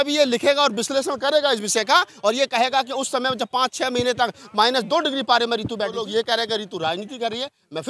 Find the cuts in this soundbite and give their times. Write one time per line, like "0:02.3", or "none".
0:06.1